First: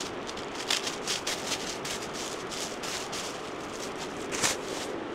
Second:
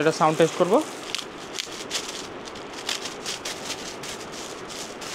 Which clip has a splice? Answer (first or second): second